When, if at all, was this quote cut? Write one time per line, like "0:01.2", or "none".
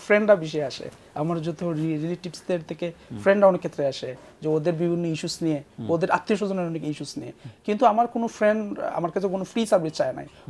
none

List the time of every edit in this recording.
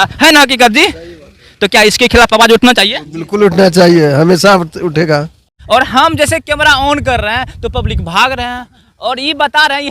0:05.5

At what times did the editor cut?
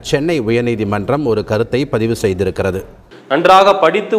0:03.1

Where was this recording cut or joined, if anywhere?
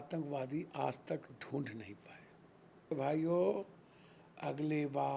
0:02.9

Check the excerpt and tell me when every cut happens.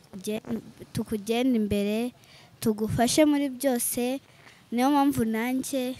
none

